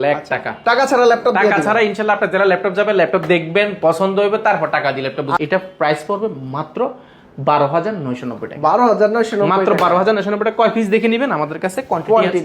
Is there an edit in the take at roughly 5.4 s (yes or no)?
yes